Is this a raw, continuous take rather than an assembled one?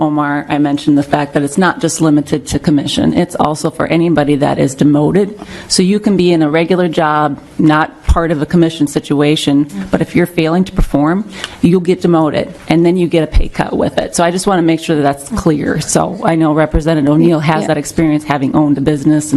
yes; 0 cuts

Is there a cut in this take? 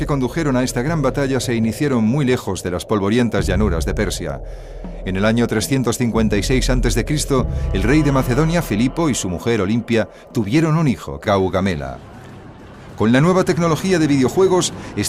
no; 0 cuts

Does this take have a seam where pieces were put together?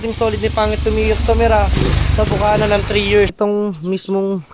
yes; 1 cut; at 3.3 s

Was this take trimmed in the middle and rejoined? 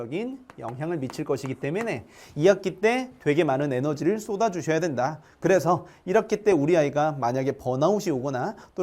yes; 1 cut; at 5.3 s

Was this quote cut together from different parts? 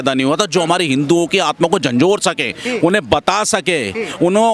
no; 0 cuts

